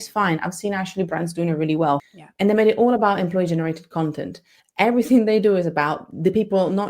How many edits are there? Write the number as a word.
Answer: one